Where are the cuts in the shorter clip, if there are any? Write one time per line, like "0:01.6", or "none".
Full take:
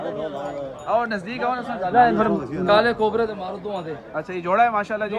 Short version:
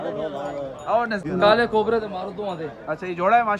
0:01.2